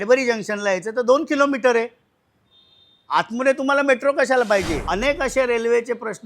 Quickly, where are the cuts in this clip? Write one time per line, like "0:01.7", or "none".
0:04.8